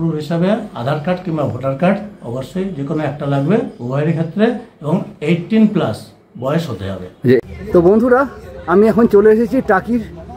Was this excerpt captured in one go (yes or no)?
no